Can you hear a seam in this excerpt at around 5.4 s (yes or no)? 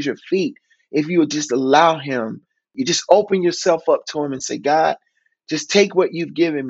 no